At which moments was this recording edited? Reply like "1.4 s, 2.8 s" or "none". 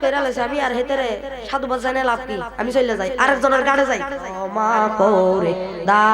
4.4 s